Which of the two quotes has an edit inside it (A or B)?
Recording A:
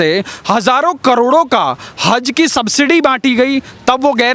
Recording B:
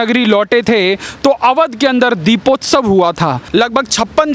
B